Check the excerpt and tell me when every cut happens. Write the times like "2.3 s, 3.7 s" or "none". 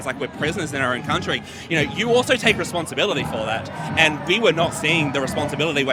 none